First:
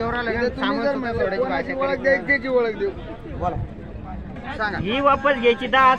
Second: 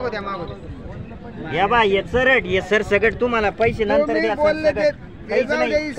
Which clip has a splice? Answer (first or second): first